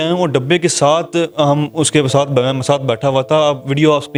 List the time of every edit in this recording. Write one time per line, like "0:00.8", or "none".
none